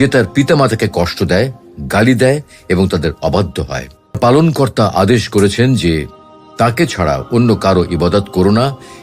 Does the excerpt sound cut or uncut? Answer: cut